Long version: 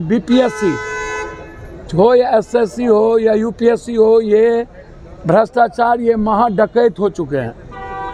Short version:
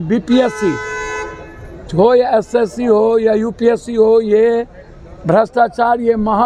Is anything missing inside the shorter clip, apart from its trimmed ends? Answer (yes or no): no